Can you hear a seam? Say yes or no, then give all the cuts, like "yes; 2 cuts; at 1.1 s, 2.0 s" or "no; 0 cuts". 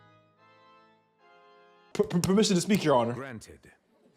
yes; 1 cut; at 1.9 s